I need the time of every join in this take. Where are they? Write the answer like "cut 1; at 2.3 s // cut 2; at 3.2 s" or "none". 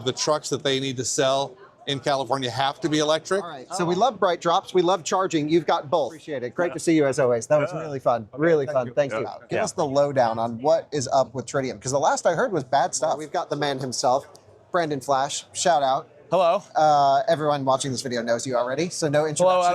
cut 1; at 3.6 s // cut 2; at 6.4 s // cut 3; at 9.4 s // cut 4; at 13.3 s